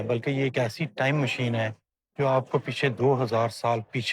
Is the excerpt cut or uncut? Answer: uncut